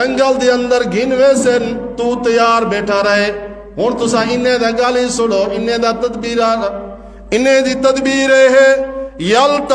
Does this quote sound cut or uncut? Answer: uncut